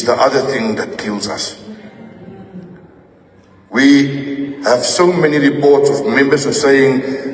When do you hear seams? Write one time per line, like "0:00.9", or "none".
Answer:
none